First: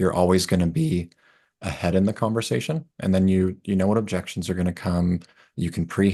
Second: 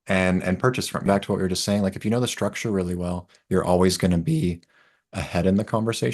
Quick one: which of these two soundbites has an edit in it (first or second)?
second